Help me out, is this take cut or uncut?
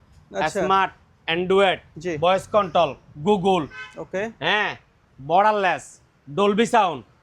uncut